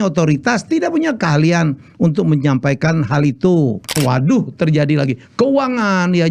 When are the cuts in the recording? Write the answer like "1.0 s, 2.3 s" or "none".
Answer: 3.9 s